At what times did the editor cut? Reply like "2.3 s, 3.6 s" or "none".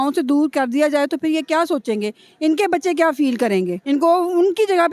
3.8 s